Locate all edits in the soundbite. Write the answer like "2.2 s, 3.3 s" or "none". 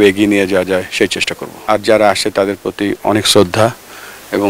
1.6 s